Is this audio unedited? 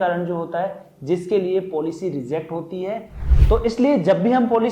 no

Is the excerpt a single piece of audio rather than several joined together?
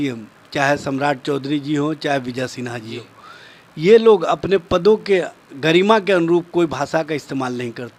yes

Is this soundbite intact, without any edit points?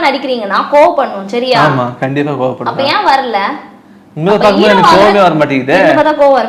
yes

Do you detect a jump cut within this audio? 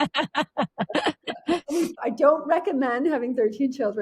yes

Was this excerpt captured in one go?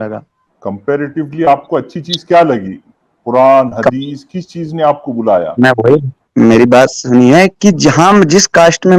yes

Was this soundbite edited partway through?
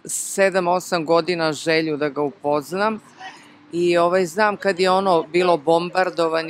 no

